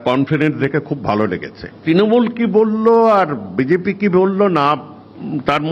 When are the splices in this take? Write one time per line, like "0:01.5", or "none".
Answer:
0:01.8